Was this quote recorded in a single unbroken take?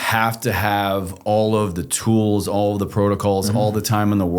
no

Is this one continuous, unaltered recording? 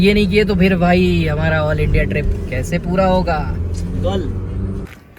yes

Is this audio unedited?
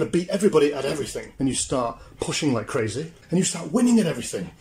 no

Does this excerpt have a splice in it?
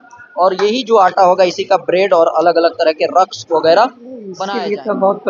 yes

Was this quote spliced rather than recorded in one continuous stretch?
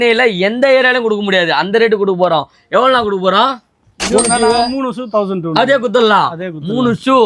no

